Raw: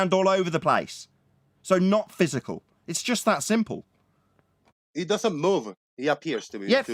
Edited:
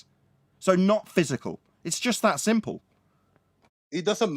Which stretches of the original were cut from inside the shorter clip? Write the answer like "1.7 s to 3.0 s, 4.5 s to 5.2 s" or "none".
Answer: none